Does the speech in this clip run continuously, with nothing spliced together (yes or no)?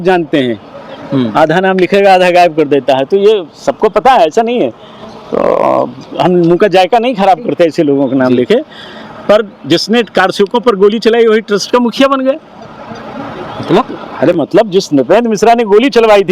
yes